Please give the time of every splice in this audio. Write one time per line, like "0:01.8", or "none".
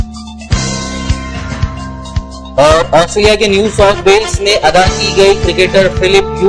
none

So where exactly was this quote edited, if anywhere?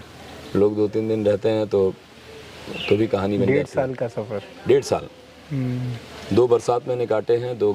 none

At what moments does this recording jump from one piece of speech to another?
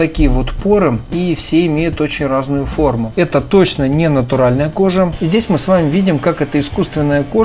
0:01.1
0:03.1
0:05.1

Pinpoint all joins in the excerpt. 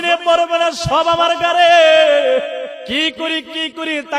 0:02.8

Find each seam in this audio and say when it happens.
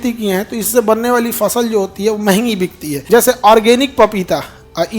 0:02.9

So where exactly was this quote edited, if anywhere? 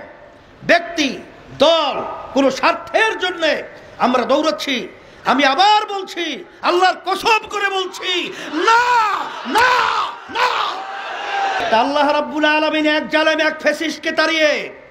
0:11.6

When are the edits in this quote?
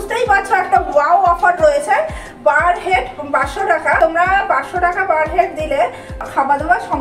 0:04.0
0:06.2

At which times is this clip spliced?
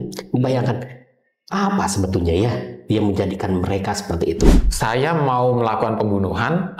0:04.6

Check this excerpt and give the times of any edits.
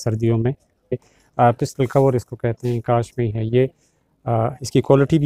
0:01.0

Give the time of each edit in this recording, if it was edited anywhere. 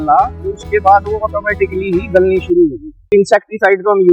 0:03.1

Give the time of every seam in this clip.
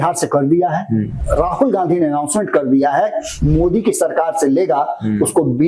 0:01.1
0:03.3

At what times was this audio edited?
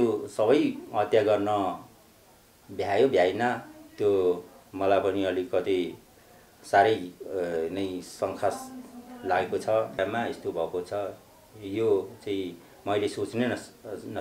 0:10.0

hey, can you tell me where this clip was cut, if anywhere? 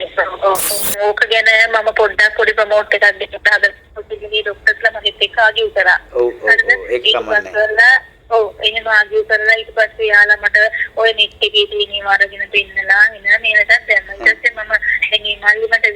0:00.9

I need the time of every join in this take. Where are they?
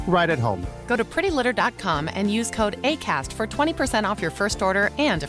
none

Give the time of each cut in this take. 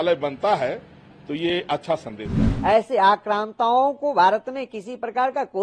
0:02.5

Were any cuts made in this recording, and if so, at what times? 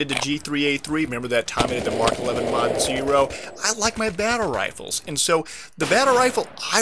0:03.1

